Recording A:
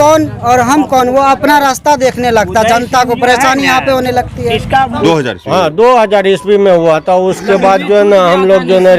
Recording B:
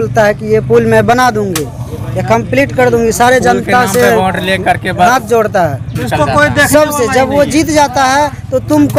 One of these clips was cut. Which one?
A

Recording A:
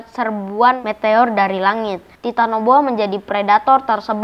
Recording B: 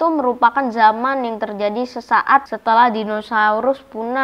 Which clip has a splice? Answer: B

